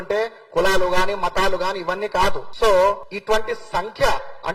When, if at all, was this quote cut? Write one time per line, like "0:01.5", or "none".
none